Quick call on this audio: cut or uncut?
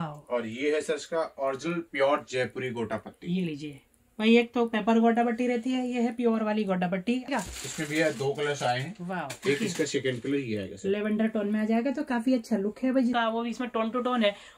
cut